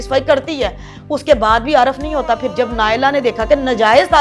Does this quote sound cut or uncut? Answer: uncut